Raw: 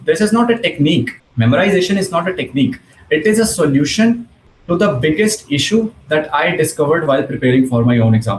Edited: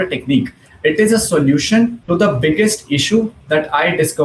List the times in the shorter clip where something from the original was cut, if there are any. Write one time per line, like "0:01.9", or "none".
0:02.0